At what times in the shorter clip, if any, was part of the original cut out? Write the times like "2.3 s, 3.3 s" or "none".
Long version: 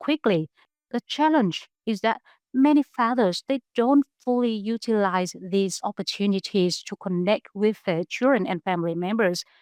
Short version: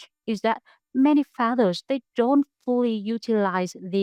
none